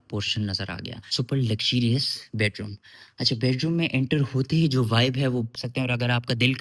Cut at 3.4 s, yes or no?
no